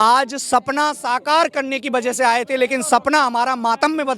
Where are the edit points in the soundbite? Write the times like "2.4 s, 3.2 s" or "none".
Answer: none